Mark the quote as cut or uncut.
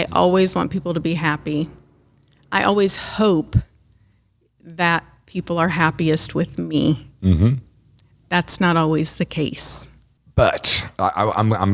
uncut